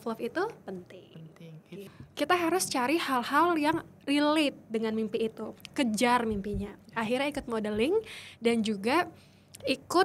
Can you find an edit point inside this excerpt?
yes; 1 cut; at 1.9 s

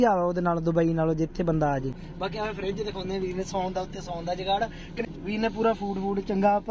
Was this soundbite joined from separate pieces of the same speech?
yes; 2 cuts; at 2.0 s, 5.0 s

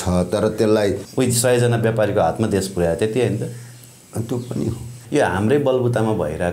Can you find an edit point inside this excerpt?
yes; 2 cuts; at 1.0 s, 4.9 s

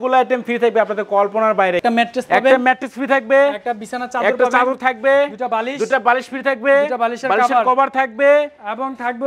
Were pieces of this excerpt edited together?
yes; 1 cut; at 1.8 s

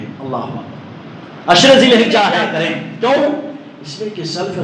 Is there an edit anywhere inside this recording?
yes; 1 cut; at 2.3 s

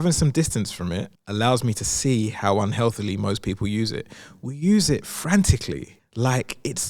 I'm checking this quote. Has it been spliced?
yes; 2 cuts; at 1.1 s, 6.0 s

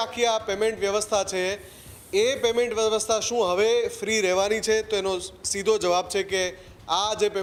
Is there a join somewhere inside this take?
no; 0 cuts

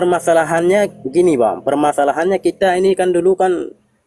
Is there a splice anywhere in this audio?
no; 0 cuts

